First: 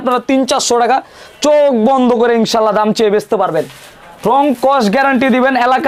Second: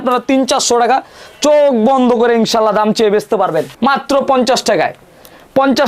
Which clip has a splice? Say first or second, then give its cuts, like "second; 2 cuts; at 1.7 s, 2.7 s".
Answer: second; 1 cut; at 3.7 s